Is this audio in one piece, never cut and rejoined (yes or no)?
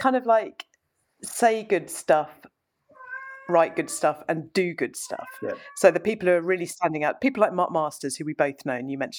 yes